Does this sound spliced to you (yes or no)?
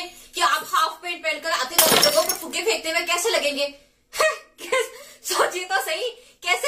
no